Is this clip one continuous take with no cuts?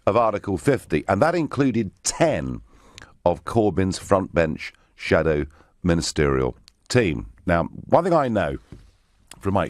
yes; 0 cuts

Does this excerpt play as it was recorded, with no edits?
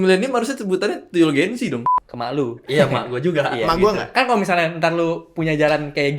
no; 1 cut; at 1.9 s

